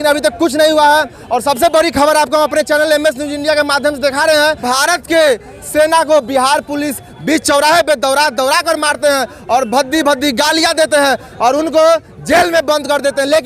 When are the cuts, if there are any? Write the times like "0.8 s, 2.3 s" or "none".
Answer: 4.6 s